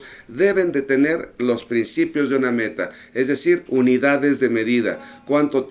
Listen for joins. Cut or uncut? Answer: uncut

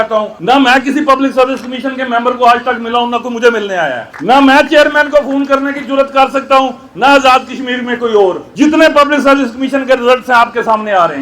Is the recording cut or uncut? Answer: uncut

